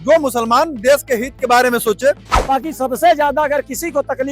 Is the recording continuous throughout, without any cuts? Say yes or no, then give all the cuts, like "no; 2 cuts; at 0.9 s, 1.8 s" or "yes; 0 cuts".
no; 1 cut; at 2.3 s